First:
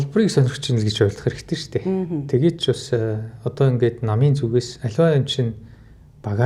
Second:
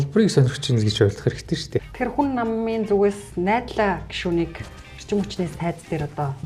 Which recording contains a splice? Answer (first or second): second